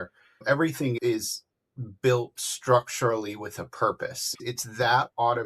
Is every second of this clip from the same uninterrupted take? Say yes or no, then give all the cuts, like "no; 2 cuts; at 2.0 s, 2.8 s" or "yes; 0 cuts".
no; 1 cut; at 4.2 s